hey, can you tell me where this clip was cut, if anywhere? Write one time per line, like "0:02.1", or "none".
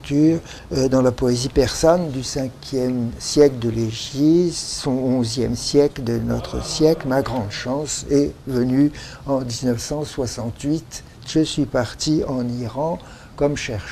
0:04.3